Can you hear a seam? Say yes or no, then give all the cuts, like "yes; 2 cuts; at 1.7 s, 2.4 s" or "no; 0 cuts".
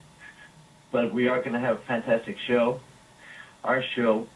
yes; 1 cut; at 2.8 s